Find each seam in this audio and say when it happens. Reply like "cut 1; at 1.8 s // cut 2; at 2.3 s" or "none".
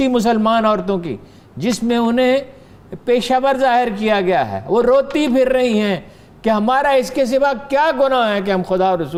none